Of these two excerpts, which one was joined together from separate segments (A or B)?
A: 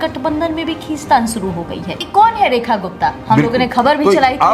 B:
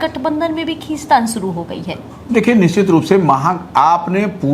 A